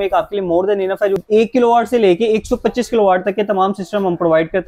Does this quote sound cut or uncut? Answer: cut